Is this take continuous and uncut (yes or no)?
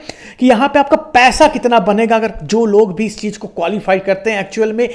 yes